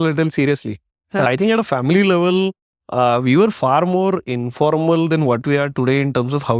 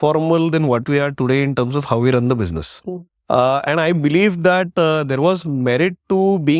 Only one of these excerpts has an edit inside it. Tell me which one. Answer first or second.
first